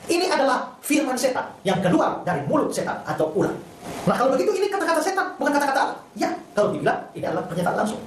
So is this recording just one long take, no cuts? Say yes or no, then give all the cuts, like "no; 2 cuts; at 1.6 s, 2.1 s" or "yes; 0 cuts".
yes; 0 cuts